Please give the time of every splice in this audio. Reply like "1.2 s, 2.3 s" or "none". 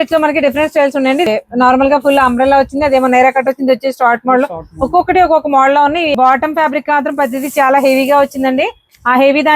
1.3 s, 6.1 s